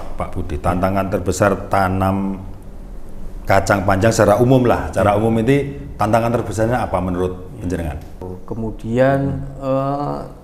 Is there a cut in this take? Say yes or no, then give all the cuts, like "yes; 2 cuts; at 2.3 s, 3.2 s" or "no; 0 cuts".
yes; 1 cut; at 8.2 s